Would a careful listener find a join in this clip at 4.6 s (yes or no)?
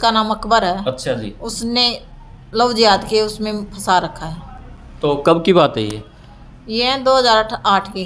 no